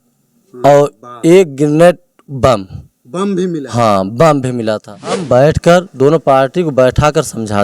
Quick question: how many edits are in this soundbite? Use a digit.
1